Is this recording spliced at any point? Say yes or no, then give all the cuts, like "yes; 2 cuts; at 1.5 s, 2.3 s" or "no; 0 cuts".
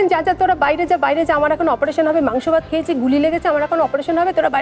no; 0 cuts